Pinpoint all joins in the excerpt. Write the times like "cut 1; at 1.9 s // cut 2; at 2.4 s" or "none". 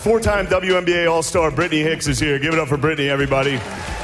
none

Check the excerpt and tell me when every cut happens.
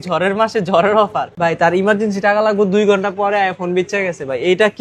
cut 1; at 1.6 s

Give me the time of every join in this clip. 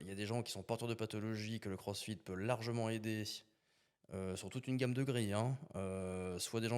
none

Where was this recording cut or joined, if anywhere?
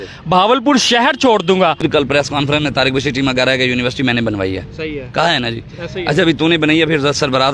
cut 1; at 1.9 s

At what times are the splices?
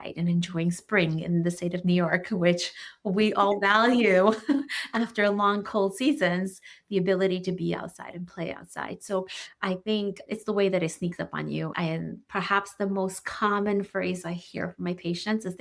cut 1; at 11.7 s

